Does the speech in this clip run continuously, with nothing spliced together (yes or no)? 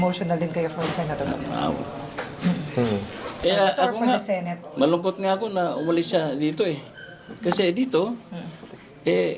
no